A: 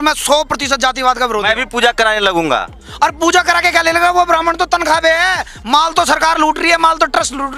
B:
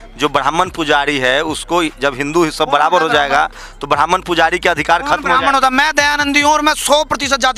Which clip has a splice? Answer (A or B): A